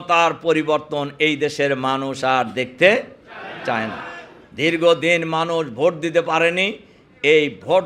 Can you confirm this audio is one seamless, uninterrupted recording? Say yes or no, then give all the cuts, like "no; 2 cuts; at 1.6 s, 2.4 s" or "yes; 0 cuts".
yes; 0 cuts